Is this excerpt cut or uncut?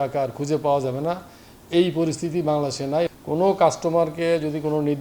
cut